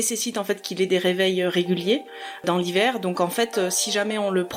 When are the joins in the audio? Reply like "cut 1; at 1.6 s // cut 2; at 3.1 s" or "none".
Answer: none